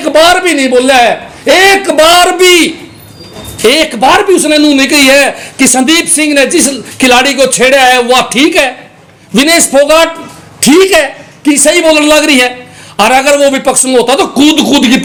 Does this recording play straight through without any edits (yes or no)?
yes